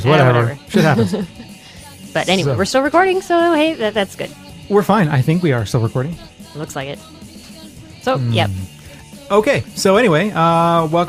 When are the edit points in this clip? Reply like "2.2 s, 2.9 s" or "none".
none